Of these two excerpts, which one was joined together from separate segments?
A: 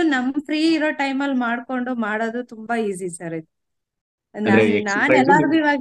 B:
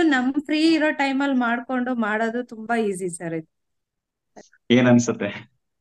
B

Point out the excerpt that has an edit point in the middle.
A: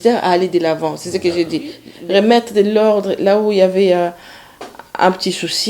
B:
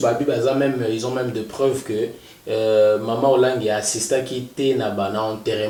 A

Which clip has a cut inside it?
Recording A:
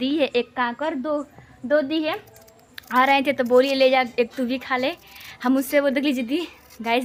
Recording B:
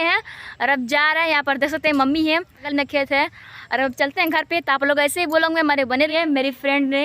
B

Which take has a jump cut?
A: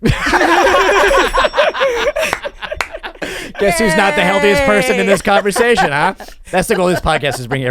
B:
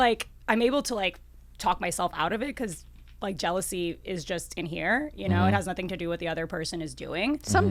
A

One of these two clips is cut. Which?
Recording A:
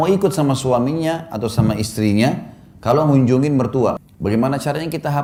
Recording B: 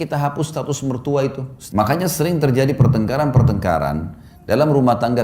B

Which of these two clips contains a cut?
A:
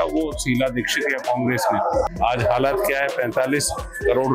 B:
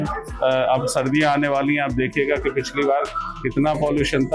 A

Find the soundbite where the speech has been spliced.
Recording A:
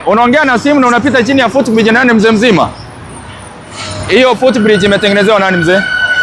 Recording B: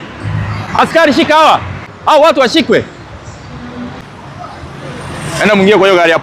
B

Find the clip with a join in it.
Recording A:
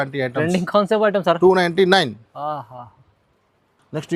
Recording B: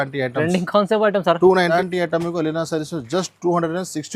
B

